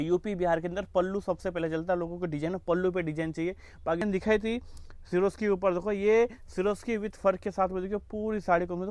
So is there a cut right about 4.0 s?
yes; 1 cut; at 4.0 s

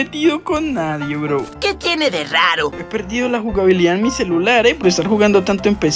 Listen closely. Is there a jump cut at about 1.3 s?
no; 1 cut; at 2.8 s

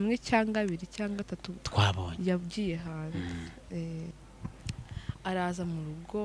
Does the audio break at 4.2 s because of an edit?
yes; 1 cut; at 4.2 s

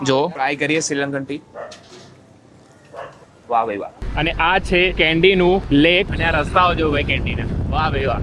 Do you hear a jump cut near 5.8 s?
yes; 3 cuts; at 4.0 s, 4.9 s, 5.8 s

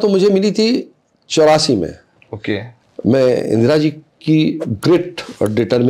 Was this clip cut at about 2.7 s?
yes; 1 cut; at 2.7 s

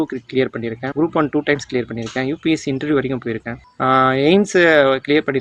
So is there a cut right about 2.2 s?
no; 2 cuts; at 0.8 s, 3.6 s

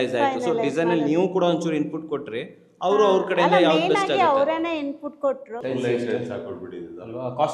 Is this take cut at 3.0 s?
no; 1 cut; at 5.6 s

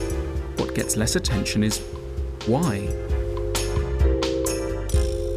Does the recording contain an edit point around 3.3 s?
yes; 1 cut; at 3.3 s

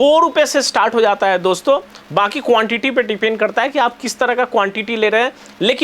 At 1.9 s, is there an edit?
no; 0 cuts

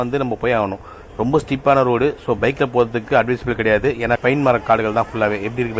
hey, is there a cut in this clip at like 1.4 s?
no; 1 cut; at 4.2 s

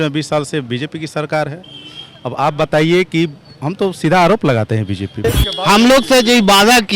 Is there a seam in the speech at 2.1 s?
no; 1 cut; at 5.4 s

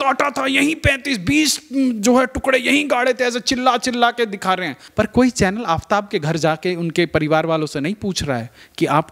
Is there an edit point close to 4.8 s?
yes; 1 cut; at 4.8 s

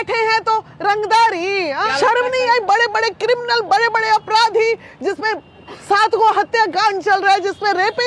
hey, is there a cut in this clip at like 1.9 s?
yes; 1 cut; at 1.9 s

